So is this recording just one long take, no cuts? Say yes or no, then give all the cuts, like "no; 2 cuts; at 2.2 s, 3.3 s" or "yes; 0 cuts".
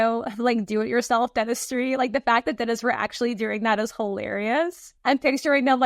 no; 1 cut; at 4.9 s